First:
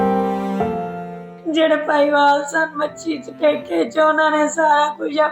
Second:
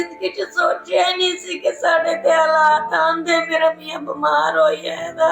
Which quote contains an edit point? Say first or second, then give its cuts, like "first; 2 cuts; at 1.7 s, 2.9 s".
first; 1 cut; at 0.9 s